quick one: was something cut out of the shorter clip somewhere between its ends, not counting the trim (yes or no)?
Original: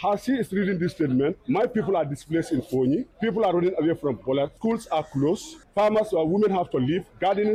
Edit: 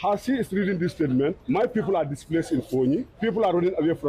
no